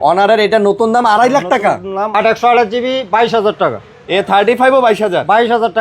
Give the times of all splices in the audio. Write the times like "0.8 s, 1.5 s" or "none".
2.1 s

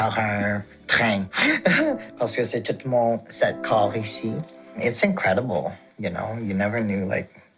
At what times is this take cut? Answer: none

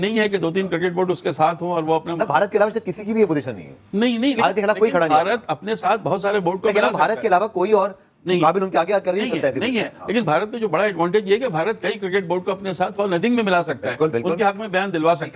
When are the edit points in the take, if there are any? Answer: none

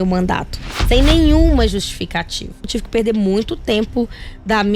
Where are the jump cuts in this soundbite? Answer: 2.8 s

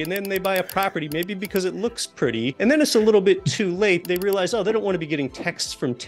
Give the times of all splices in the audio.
2.5 s, 4.1 s

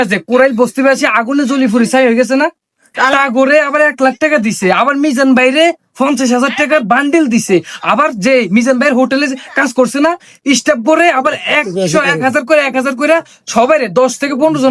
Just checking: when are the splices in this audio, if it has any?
none

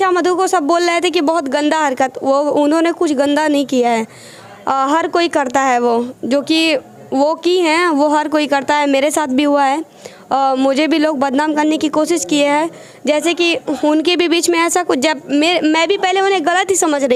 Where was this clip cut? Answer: none

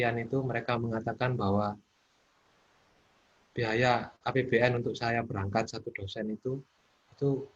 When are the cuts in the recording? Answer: none

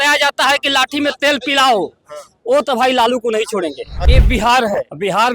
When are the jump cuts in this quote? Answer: 4.0 s

